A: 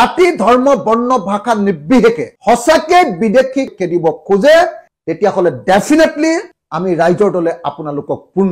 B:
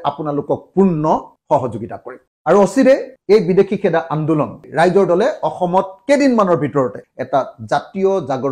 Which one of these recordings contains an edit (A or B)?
B